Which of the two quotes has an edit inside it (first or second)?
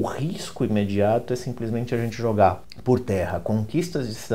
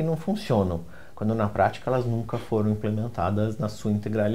first